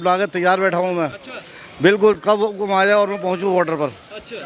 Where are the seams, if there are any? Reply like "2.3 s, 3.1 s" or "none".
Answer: none